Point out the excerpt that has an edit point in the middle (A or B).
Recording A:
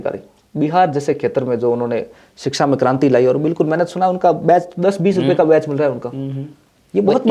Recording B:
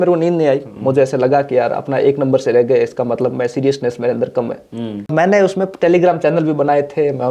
B